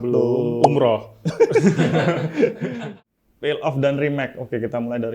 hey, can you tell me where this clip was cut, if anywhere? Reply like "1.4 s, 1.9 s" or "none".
2.8 s